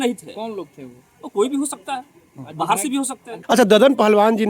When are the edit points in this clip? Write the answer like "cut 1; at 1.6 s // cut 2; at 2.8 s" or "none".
cut 1; at 3.3 s